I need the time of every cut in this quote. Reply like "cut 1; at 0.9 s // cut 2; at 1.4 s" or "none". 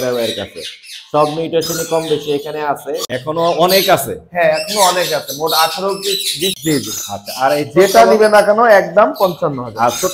cut 1; at 3.1 s // cut 2; at 6.6 s